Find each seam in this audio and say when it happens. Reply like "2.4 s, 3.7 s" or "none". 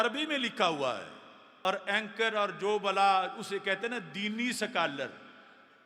1.6 s